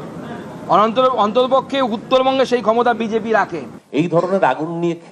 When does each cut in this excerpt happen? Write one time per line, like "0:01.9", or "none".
0:03.8